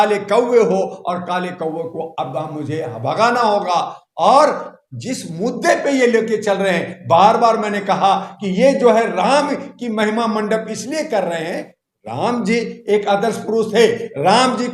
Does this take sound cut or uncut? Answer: uncut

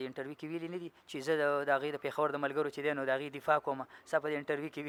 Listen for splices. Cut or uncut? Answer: uncut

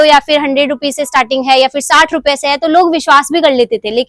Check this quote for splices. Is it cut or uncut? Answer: uncut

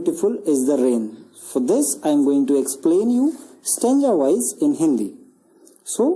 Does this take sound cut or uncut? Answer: uncut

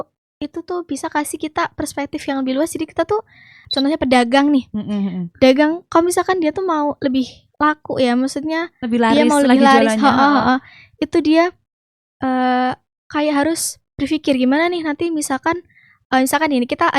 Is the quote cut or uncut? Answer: cut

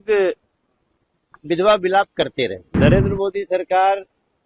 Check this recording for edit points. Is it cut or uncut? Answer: cut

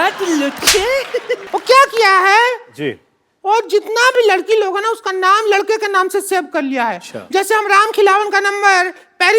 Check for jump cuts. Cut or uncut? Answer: cut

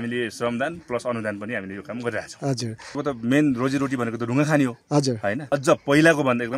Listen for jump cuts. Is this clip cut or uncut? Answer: cut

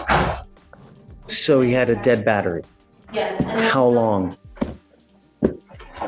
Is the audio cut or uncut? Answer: cut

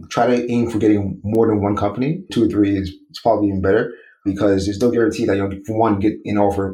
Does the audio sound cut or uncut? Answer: cut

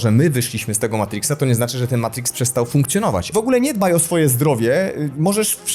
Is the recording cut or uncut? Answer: cut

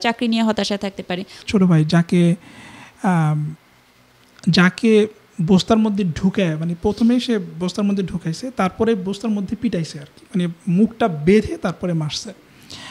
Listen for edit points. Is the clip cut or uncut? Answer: cut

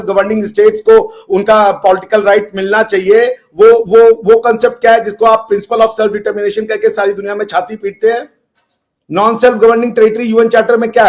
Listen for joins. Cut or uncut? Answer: uncut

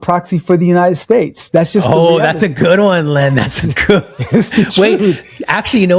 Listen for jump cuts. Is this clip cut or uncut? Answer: uncut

